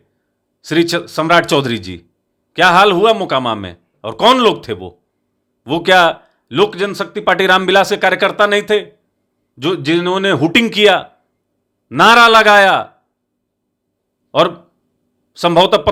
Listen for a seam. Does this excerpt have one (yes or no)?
no